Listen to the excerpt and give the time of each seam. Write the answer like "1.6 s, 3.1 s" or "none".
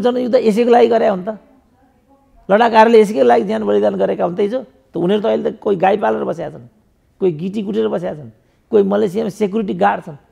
none